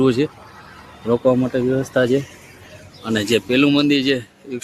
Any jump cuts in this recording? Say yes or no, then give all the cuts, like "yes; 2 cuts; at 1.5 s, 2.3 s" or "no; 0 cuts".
no; 0 cuts